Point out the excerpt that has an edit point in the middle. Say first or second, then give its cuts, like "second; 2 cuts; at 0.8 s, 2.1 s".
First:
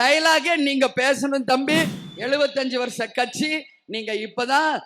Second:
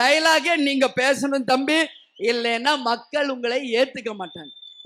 first; 1 cut; at 2.0 s